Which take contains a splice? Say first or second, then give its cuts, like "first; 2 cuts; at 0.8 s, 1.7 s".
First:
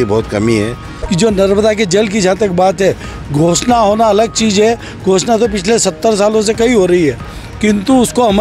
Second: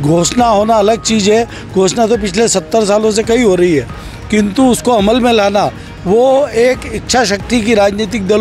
first; 1 cut; at 1.0 s